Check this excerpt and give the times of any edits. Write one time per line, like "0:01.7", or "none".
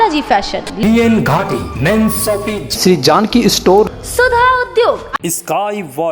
0:05.2